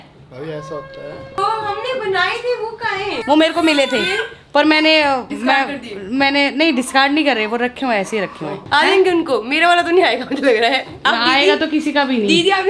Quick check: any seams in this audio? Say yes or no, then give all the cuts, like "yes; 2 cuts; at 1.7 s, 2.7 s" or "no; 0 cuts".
no; 0 cuts